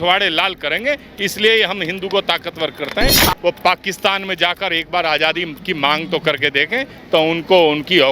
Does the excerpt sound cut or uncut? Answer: cut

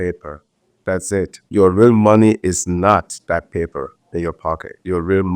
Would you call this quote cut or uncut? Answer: cut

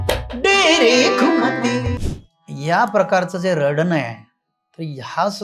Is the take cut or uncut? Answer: cut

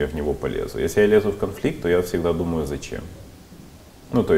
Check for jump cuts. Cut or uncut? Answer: uncut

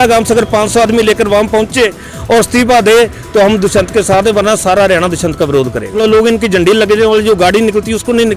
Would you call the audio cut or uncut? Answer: cut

